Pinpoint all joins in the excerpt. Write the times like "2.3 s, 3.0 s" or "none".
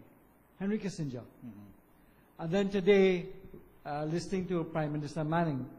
1.1 s